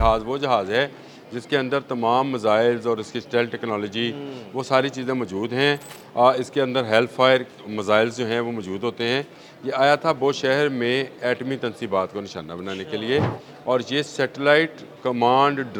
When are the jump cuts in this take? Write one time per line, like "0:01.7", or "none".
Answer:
none